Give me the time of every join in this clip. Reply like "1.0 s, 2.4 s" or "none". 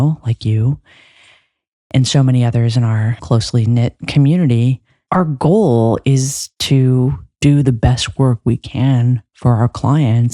3.1 s, 4.9 s